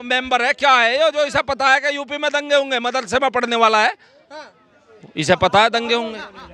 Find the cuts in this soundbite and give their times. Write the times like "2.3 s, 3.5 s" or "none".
none